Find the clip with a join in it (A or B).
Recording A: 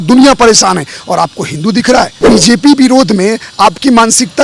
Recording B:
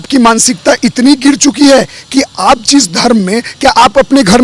A